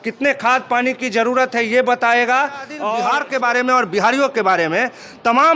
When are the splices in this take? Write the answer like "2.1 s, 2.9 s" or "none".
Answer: 2.9 s

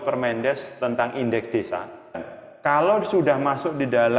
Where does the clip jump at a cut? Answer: 2.3 s

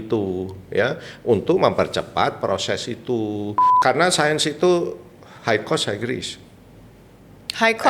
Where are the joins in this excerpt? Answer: 3.6 s

